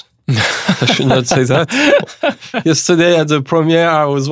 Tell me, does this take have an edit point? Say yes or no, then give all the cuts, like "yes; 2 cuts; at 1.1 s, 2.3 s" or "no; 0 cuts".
no; 0 cuts